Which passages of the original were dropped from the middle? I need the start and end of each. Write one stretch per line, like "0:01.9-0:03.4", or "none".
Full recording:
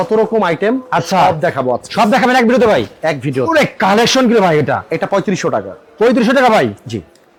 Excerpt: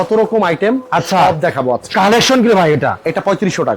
0:01.9-0:03.7